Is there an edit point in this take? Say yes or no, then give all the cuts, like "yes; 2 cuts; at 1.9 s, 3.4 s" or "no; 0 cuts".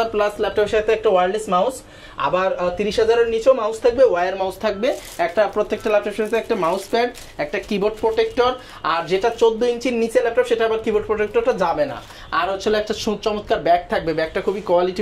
no; 0 cuts